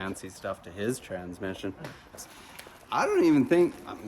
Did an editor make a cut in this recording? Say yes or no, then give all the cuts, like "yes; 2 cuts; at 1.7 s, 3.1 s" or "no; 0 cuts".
yes; 1 cut; at 2.1 s